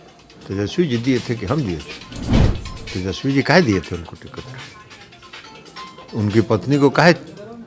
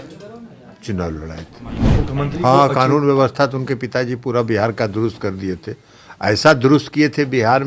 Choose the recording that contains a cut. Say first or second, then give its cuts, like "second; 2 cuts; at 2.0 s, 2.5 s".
second; 1 cut; at 1.8 s